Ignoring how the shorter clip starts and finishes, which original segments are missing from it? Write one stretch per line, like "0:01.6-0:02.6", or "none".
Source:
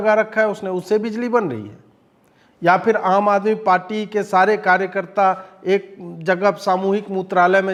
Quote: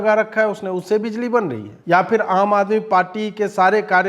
0:01.7-0:02.4

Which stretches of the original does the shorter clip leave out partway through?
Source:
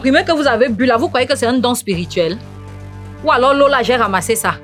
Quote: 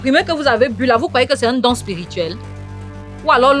none

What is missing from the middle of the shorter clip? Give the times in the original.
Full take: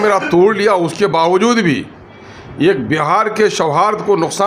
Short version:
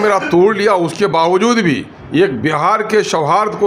0:01.9-0:02.4

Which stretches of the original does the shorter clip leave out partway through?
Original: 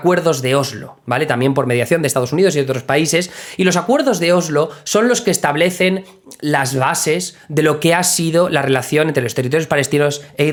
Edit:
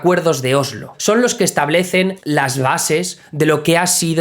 0:00.9-0:04.8
0:06.1-0:06.4

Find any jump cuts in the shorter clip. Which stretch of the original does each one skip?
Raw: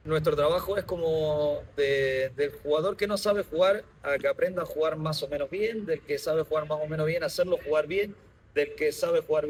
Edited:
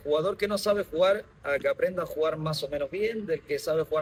none

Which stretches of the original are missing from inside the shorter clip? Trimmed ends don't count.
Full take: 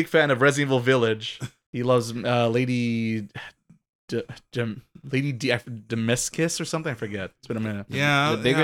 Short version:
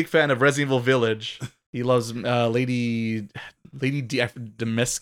0:03.6-0:04.9

